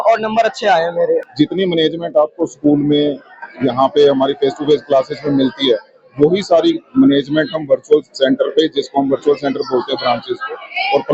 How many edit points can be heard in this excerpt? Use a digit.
1